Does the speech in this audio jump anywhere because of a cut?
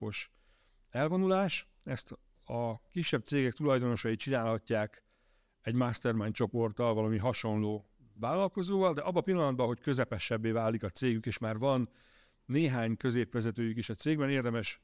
no; 0 cuts

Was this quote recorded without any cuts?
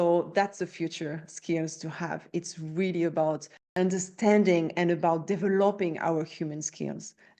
no; 1 cut; at 3.6 s

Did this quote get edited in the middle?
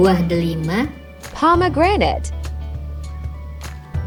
no; 0 cuts

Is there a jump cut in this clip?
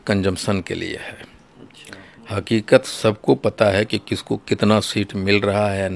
no; 0 cuts

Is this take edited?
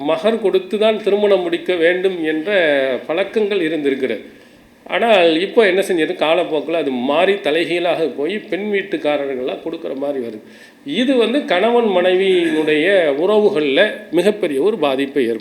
no; 0 cuts

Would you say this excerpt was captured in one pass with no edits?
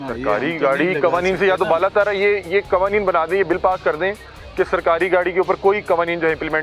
yes; 0 cuts

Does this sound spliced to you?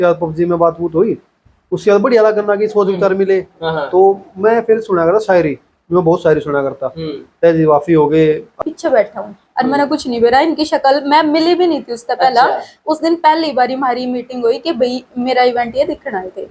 yes; 1 cut; at 8.6 s

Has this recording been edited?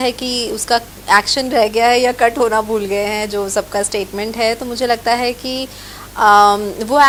no; 0 cuts

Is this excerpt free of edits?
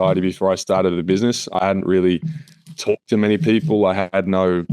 yes; 0 cuts

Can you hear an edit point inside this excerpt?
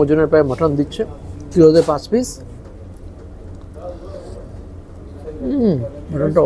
no; 0 cuts

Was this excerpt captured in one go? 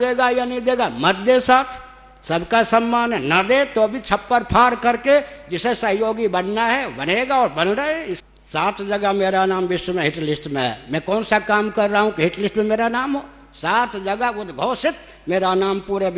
no; 1 cut; at 8.1 s

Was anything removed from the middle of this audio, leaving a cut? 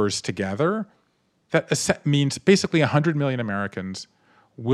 no; 0 cuts

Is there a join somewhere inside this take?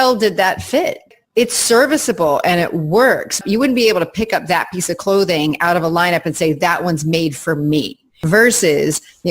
yes; 3 cuts; at 1.1 s, 3.4 s, 8.2 s

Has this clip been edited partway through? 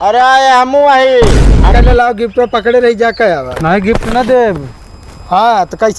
yes; 1 cut; at 1.7 s

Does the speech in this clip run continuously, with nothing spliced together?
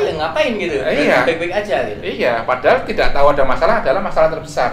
yes; 0 cuts

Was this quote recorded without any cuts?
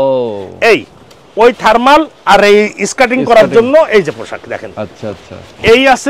yes; 0 cuts

